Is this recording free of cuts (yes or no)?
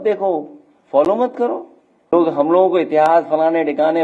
no